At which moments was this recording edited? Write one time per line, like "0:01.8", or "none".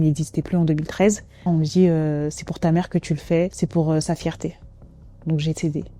0:01.4
0:03.5
0:05.0